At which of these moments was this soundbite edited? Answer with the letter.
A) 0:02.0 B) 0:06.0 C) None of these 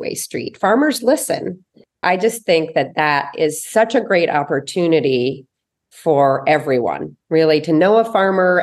A